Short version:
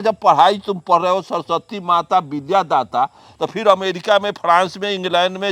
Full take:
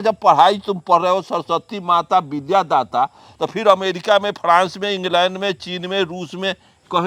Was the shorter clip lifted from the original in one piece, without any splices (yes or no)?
yes